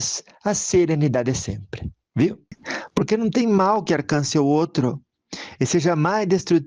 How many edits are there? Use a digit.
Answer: 1